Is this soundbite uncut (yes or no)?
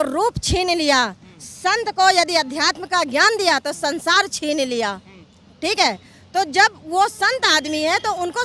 yes